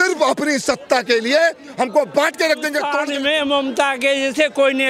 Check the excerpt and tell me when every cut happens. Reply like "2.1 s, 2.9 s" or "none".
2.9 s